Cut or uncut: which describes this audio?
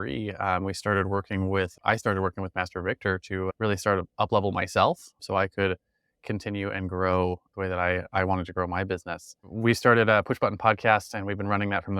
uncut